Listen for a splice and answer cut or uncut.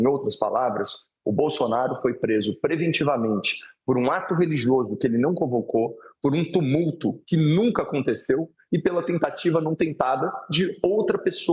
uncut